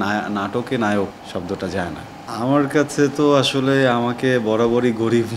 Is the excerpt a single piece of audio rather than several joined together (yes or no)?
no